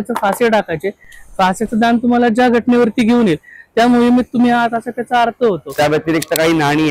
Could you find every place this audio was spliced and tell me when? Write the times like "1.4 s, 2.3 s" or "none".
5.7 s